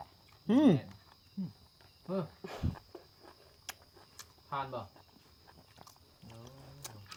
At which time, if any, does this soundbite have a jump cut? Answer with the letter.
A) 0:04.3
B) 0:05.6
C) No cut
C